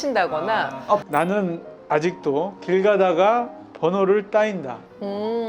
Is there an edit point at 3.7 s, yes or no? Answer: no